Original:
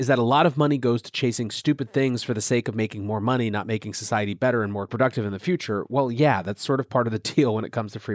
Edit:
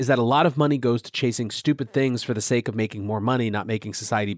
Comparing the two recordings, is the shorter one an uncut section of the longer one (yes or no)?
yes